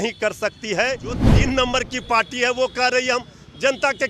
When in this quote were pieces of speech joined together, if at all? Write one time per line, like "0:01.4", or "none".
0:01.2

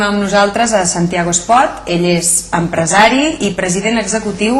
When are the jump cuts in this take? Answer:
none

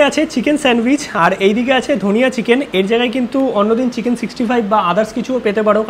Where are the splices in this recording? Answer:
none

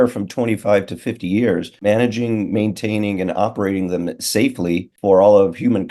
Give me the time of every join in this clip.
0:01.8
0:04.9

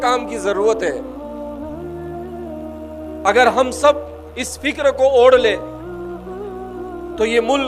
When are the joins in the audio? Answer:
0:01.0
0:03.2

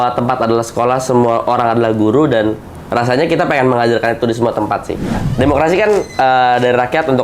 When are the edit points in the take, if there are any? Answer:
0:05.2

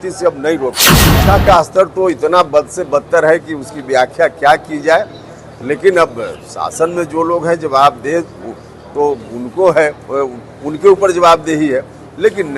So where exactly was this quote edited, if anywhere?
0:01.0

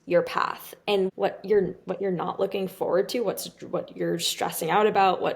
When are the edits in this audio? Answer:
0:01.1

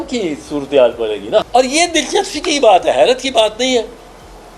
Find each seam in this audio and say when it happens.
0:01.4

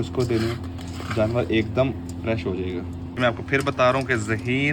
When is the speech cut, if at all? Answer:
0:03.2

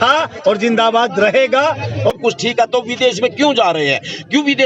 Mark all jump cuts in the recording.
0:02.1

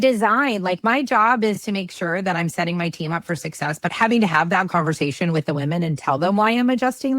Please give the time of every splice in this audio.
0:03.9

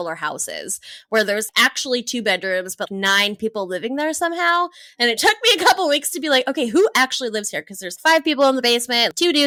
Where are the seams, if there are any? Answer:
none

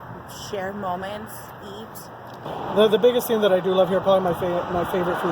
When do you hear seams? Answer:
0:02.5

